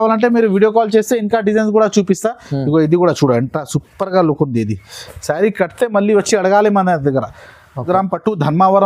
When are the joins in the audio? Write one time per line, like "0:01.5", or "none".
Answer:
0:07.8